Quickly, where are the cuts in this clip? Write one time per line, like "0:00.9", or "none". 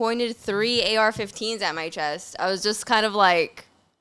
none